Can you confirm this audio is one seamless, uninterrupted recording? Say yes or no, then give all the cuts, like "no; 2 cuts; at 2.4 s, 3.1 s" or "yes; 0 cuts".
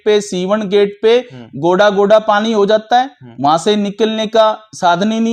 yes; 0 cuts